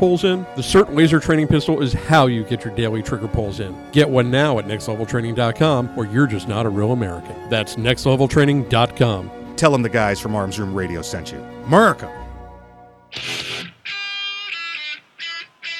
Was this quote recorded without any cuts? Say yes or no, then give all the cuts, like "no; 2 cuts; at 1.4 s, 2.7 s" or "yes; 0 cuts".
no; 1 cut; at 13.1 s